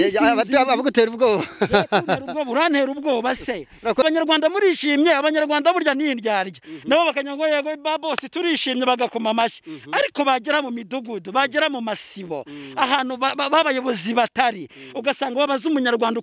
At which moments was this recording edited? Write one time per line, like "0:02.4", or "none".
0:04.0